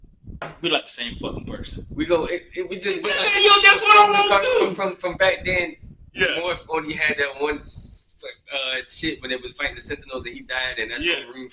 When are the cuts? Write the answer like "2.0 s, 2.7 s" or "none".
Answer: none